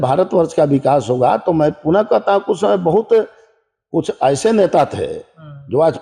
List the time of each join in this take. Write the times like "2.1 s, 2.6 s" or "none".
none